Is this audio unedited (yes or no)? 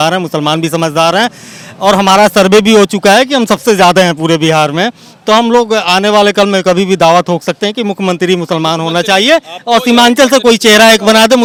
yes